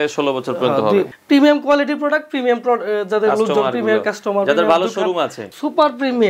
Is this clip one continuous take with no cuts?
no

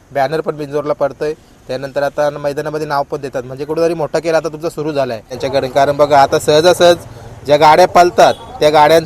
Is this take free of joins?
no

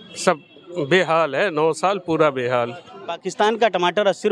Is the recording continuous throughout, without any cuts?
no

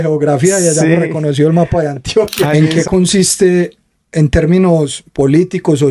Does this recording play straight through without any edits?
no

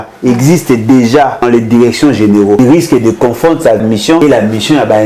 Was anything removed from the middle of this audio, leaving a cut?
yes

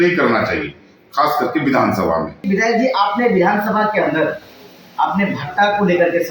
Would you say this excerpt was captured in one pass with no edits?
no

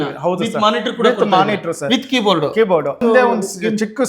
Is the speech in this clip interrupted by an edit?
yes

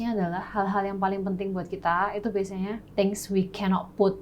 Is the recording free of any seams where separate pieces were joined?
no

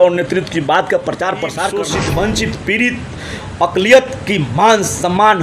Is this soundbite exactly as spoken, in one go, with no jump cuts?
no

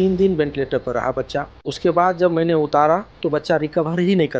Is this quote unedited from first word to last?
no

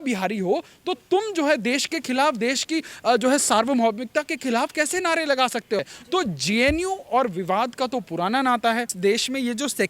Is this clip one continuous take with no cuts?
no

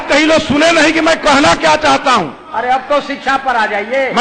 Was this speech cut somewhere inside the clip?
no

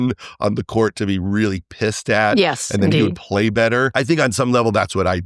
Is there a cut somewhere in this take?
yes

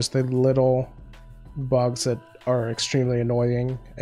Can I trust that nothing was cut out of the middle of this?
yes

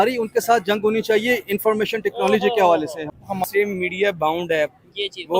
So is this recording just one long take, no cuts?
no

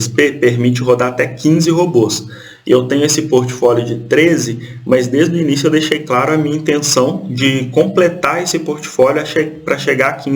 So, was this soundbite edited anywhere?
no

